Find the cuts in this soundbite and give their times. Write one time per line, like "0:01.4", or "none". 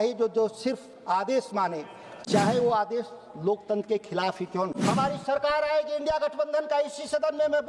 0:04.8